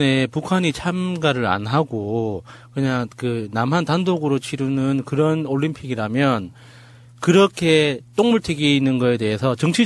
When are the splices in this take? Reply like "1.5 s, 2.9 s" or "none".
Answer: none